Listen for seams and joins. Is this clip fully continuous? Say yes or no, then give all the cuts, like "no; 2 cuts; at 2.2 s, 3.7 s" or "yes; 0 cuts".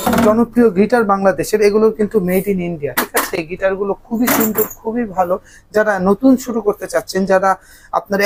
yes; 0 cuts